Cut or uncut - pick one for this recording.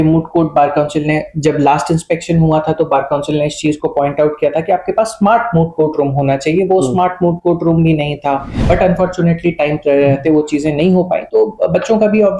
cut